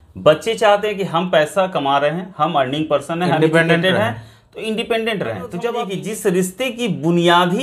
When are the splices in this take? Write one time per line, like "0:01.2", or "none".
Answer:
0:05.9